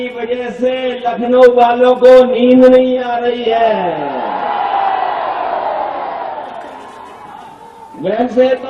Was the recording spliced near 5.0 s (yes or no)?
no